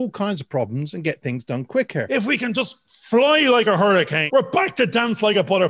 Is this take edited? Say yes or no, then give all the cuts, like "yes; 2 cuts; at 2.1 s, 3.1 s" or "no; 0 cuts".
yes; 2 cuts; at 2.1 s, 4.2 s